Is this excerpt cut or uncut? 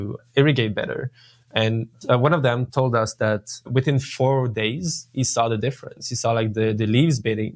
uncut